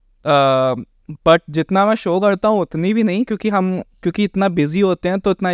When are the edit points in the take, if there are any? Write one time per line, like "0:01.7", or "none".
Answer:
none